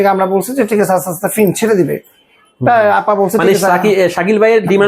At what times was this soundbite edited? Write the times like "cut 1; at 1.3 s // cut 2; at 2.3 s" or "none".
none